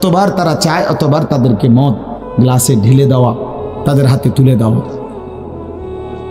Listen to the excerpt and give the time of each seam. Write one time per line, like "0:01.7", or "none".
0:05.0